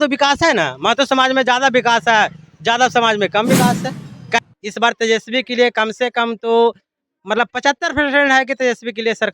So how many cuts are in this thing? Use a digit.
1